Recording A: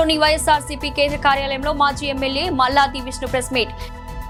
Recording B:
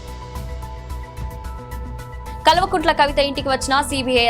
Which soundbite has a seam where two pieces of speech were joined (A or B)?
B